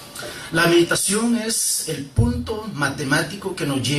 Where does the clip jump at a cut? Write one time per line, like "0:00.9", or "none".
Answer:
0:00.9